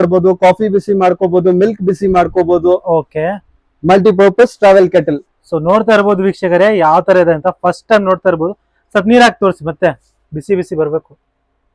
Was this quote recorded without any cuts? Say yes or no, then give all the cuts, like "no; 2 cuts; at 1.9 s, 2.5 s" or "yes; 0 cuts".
yes; 0 cuts